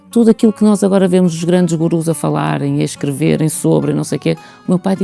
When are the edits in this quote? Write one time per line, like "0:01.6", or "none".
none